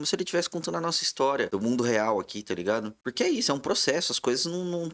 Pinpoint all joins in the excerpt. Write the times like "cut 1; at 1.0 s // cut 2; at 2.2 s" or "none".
cut 1; at 1.5 s // cut 2; at 3.0 s